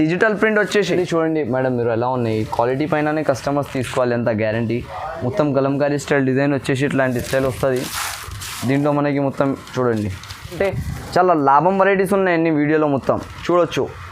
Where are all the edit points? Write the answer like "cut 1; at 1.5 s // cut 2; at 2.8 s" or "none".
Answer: cut 1; at 0.9 s // cut 2; at 10.6 s